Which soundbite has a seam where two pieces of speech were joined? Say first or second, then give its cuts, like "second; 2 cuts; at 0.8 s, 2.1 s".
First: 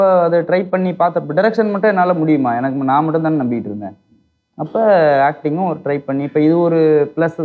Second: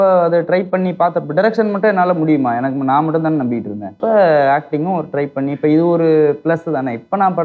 second; 1 cut; at 3.8 s